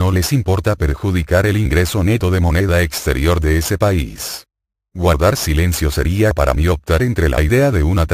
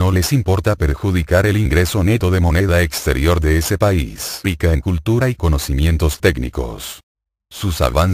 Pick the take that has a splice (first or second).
first